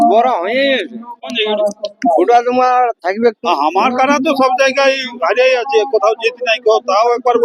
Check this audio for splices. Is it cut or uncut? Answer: cut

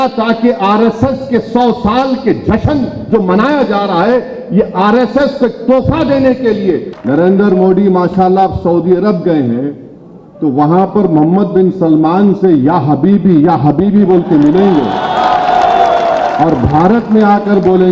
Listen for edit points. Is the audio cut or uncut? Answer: cut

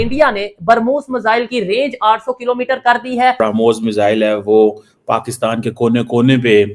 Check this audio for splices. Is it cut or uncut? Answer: cut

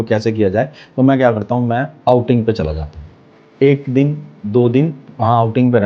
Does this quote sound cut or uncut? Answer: cut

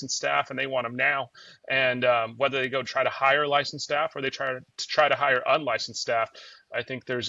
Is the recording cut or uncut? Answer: uncut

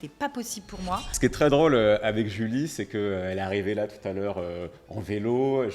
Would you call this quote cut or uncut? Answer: cut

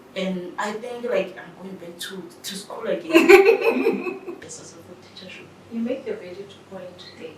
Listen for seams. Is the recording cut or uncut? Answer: cut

